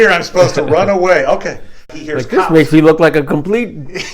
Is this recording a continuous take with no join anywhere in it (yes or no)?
no